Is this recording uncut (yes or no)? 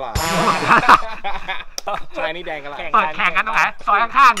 no